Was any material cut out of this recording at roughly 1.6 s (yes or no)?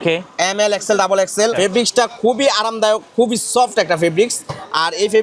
yes